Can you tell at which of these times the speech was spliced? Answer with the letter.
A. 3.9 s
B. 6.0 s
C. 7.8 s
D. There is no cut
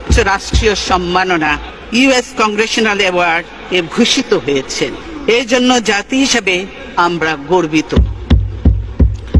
D